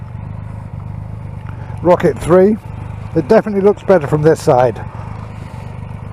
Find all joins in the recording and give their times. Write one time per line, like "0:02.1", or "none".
none